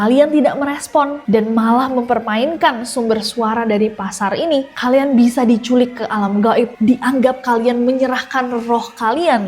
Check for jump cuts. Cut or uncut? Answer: cut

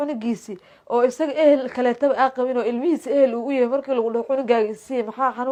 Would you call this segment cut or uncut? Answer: uncut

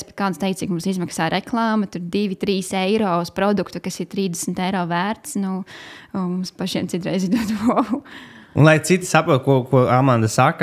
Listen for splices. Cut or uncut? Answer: uncut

